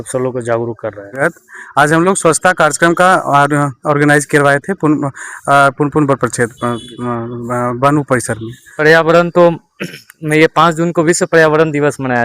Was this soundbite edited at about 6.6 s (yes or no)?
no